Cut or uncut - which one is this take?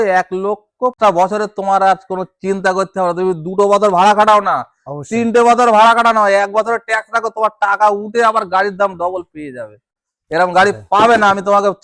cut